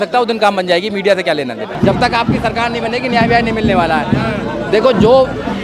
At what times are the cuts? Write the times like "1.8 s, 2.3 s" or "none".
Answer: none